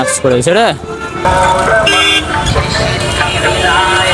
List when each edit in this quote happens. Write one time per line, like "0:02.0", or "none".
0:01.2